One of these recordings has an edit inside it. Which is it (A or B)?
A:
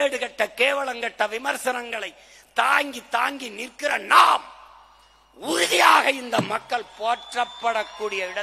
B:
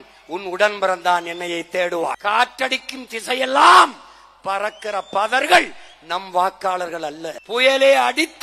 B